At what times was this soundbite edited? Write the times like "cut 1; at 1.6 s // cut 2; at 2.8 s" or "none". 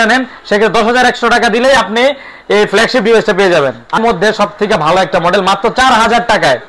cut 1; at 4.0 s